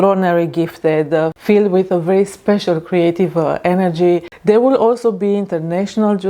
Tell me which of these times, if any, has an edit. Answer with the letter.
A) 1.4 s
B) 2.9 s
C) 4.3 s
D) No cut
C